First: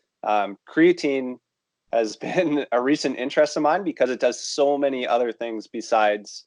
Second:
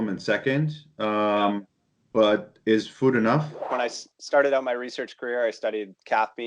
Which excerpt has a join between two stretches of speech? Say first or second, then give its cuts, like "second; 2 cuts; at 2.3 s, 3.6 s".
second; 1 cut; at 3.7 s